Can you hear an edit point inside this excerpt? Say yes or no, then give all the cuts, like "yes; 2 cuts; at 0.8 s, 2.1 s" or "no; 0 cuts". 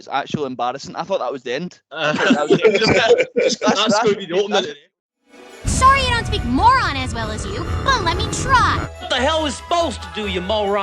yes; 1 cut; at 4.7 s